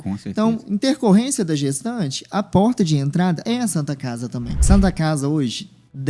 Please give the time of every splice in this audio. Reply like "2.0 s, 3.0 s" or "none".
3.4 s, 4.6 s

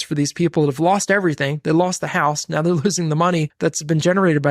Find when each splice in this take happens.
3.5 s

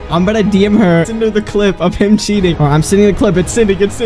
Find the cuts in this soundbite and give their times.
2.6 s

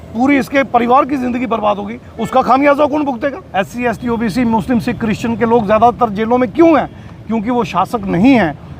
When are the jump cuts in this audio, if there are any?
3.4 s

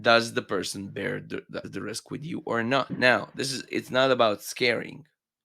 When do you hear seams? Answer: 1.6 s, 3.0 s

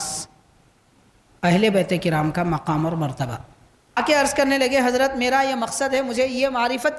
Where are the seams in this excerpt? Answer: 4.0 s

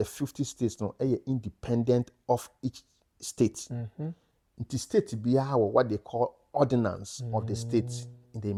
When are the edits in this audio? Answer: none

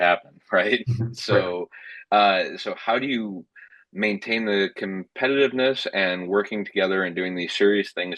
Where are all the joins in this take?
none

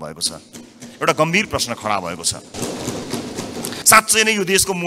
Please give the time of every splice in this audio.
3.7 s

